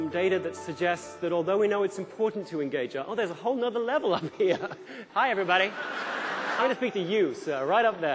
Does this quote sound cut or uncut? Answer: cut